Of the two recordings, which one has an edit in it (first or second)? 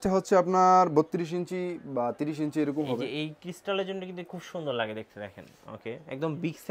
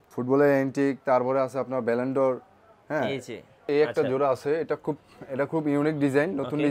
second